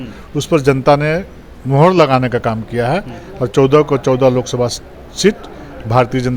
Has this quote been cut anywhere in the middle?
no; 0 cuts

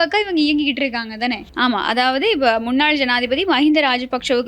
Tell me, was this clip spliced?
yes; 1 cut; at 1.5 s

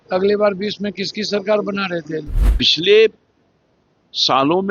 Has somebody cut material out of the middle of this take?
yes; 1 cut; at 2.4 s

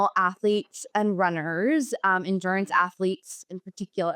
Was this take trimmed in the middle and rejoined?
no; 0 cuts

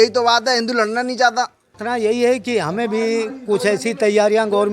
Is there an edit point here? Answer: yes; 1 cut; at 1.7 s

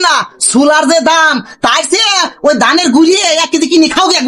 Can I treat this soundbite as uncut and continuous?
yes; 0 cuts

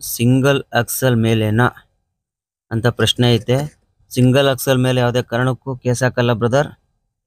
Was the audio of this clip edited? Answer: no; 0 cuts

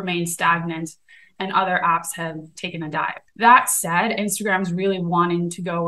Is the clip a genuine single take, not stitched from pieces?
no; 1 cut; at 3.2 s

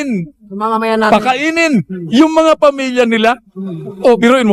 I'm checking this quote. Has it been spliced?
no; 0 cuts

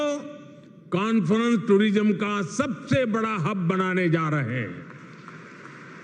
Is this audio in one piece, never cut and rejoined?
yes; 0 cuts

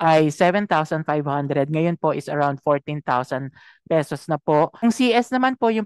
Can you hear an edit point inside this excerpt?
yes; 1 cut; at 4.8 s

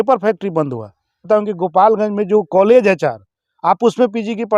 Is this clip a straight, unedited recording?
no; 1 cut; at 1.3 s

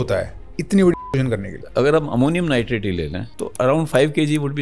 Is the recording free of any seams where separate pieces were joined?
no; 2 cuts; at 1.6 s, 3.2 s

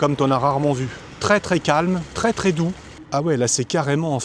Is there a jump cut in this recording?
yes; 1 cut; at 2.9 s

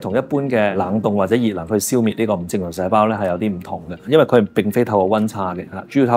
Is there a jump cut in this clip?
no; 0 cuts

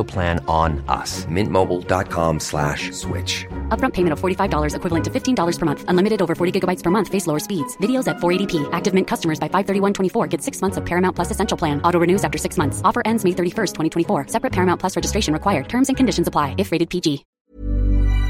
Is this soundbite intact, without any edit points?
no; 1 cut; at 17.3 s

